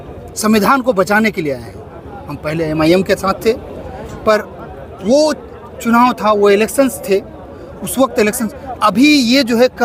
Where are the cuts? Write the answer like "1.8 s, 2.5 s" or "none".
none